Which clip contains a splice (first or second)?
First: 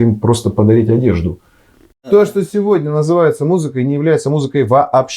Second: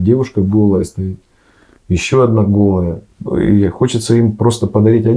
first